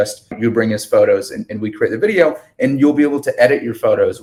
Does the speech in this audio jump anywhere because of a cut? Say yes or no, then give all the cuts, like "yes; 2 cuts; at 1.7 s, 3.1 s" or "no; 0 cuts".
no; 0 cuts